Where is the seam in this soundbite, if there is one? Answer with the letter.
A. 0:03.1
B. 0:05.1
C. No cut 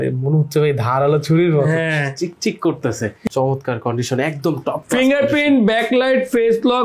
A